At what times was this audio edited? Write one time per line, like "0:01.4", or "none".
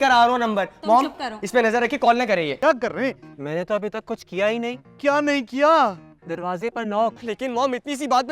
0:02.6
0:07.2